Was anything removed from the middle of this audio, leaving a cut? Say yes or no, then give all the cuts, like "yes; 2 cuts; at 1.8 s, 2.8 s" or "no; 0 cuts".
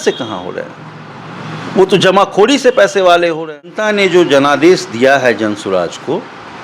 yes; 1 cut; at 3.8 s